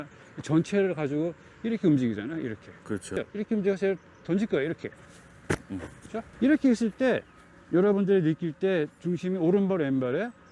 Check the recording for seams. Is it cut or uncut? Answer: cut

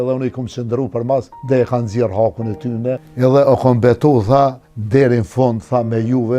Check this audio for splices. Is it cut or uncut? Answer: cut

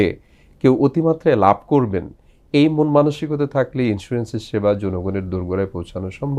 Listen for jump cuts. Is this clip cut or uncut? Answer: uncut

